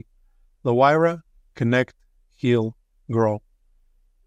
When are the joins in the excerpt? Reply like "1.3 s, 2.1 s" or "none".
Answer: none